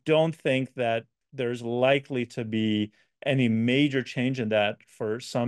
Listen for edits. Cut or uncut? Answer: uncut